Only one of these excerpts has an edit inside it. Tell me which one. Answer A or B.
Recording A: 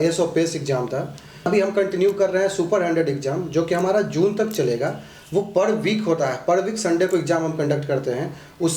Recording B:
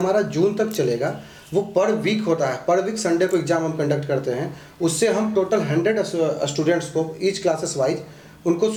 A